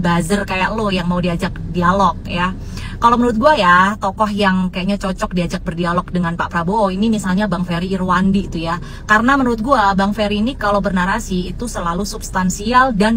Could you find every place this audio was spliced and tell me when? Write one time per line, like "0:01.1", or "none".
none